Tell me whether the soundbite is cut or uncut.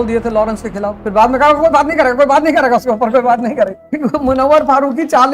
cut